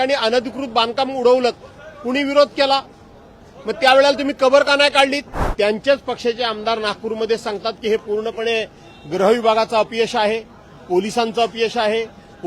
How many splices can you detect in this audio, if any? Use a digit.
1